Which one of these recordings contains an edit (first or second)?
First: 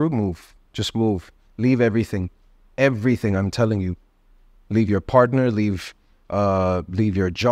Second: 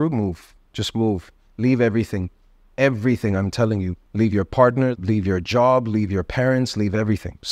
second